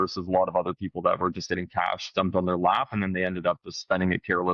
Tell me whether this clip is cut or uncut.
uncut